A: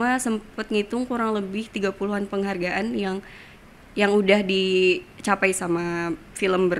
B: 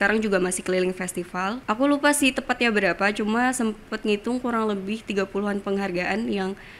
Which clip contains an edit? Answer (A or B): B